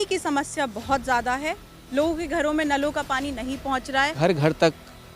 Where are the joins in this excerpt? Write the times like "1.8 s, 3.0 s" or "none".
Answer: 4.1 s